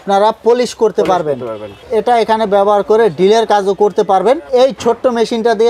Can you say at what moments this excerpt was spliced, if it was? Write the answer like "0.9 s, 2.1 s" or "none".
1.8 s, 4.5 s